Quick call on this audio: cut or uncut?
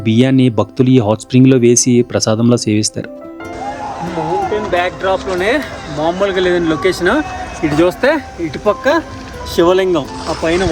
cut